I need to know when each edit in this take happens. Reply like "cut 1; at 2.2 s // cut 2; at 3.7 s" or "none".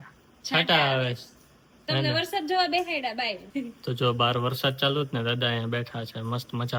none

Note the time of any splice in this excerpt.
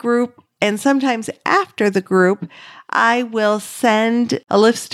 none

